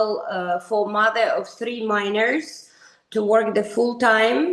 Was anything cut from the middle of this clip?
no; 0 cuts

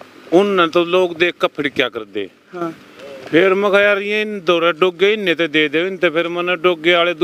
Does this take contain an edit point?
no; 0 cuts

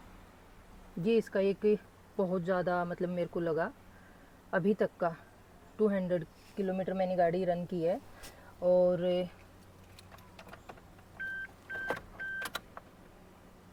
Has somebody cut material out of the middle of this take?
no; 0 cuts

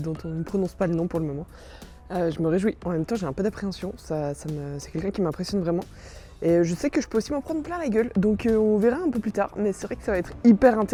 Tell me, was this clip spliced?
no; 0 cuts

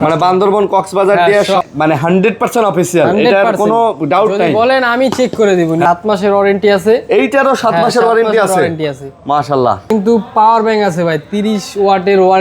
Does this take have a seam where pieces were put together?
yes; 3 cuts; at 1.6 s, 5.8 s, 9.9 s

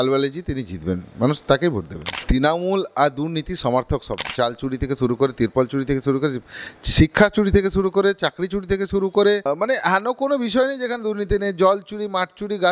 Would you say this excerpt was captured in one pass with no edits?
no; 3 cuts; at 2.2 s, 4.3 s, 9.5 s

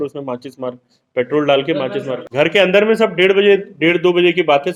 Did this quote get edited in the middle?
no; 0 cuts

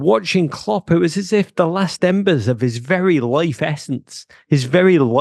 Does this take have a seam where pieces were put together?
no; 0 cuts

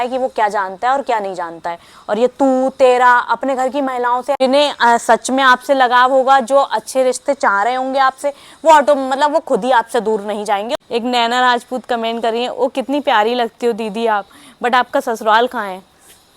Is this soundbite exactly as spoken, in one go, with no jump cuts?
no; 2 cuts; at 4.4 s, 10.8 s

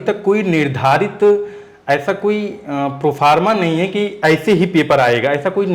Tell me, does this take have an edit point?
no; 0 cuts

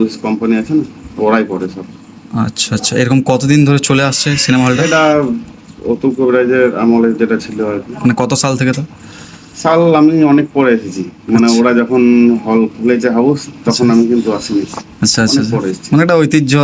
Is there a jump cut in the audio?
no; 0 cuts

